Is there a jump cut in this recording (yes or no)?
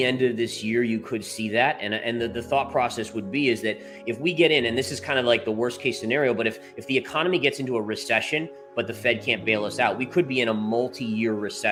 no